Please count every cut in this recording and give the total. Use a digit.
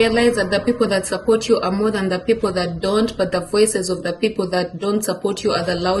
0